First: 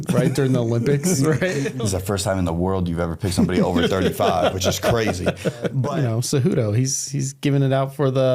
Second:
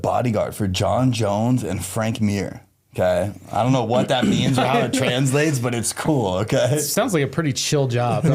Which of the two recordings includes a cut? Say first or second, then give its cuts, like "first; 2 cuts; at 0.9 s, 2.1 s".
first; 2 cuts; at 1.7 s, 5.8 s